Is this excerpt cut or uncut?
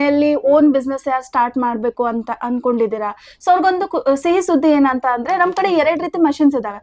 uncut